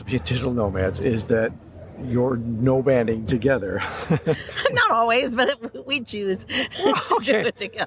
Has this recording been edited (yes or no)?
no